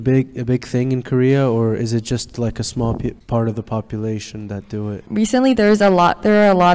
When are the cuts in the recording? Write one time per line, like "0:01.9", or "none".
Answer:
0:03.2
0:05.0